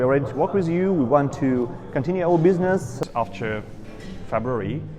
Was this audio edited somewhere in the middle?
yes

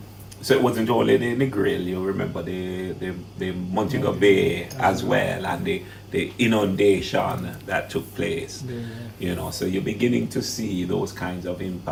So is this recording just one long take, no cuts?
yes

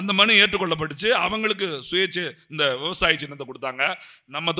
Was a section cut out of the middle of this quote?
no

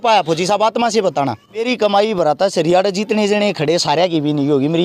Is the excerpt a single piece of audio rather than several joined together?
no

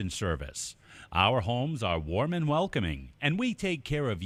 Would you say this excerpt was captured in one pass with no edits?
yes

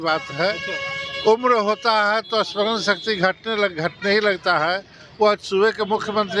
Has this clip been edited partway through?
no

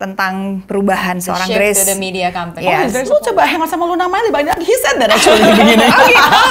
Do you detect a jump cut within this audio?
yes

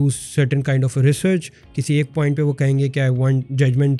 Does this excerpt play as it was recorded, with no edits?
yes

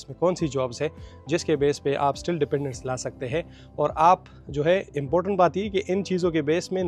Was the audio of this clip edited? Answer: no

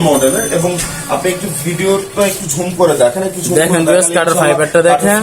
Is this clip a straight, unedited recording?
yes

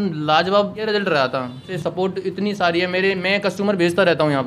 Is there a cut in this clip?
yes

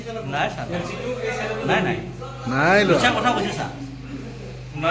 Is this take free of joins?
yes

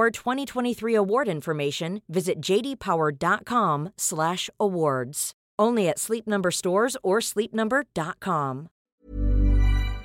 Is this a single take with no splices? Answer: no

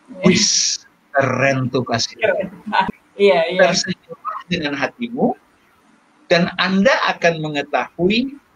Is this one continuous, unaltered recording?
no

